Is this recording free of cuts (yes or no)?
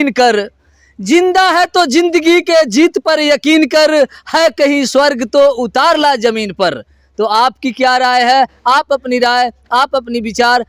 yes